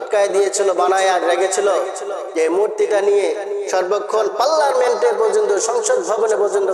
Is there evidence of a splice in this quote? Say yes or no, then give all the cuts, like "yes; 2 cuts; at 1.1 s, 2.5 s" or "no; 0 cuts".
no; 0 cuts